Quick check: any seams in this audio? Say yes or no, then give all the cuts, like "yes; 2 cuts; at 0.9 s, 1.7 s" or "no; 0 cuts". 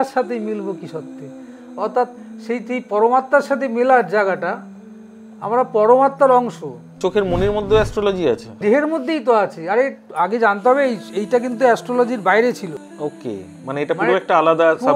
yes; 2 cuts; at 7.0 s, 12.8 s